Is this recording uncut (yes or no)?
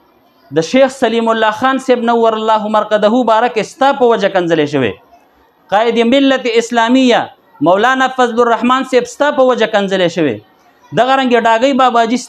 yes